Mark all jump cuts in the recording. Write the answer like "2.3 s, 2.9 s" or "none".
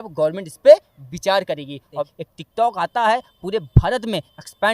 2.1 s